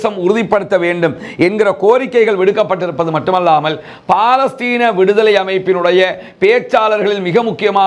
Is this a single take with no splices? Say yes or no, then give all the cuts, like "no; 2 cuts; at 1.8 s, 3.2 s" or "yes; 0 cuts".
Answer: yes; 0 cuts